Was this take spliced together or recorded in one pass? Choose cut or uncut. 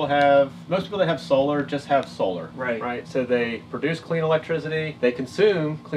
cut